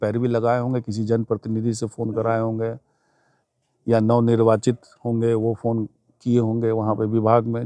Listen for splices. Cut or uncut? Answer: uncut